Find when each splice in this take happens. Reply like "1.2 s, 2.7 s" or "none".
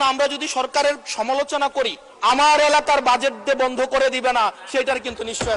2.0 s

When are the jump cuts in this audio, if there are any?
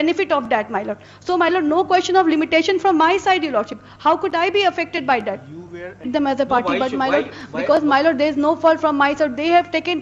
6.1 s

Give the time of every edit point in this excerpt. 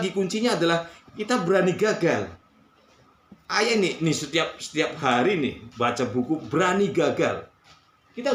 none

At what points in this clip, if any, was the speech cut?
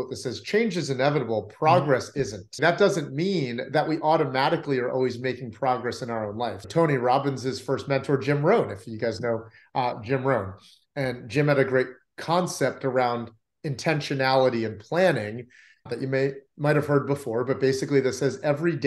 2.5 s, 6.6 s, 15.9 s

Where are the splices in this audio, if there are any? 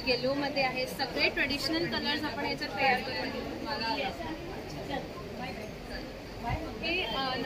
none

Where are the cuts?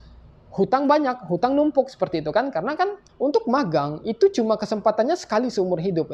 3.0 s

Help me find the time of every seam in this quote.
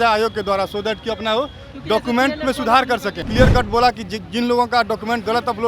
3.2 s

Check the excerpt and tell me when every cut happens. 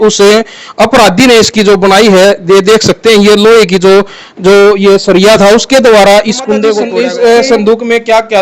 6.8 s

